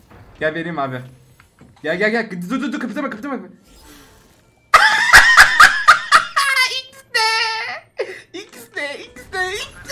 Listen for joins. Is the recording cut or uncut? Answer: uncut